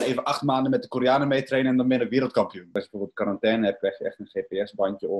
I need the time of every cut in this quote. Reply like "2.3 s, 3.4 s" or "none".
2.7 s

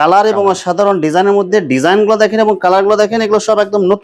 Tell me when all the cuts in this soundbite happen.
none

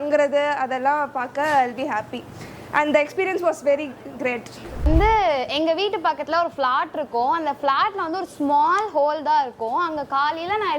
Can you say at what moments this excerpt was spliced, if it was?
none

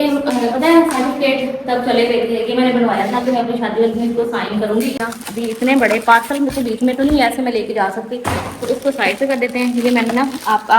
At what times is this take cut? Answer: 5.1 s

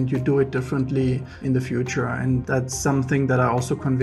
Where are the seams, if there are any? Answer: 1.3 s, 2.4 s

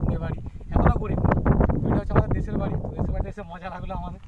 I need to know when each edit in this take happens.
none

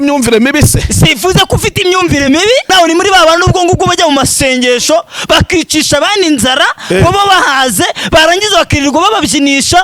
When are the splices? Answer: 2.7 s

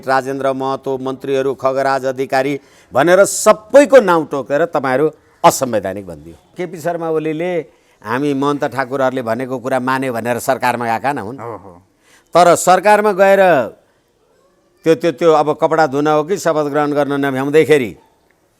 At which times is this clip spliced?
6.5 s

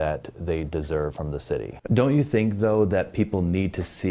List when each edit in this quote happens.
1.7 s

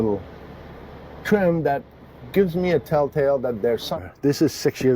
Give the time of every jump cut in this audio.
3.9 s

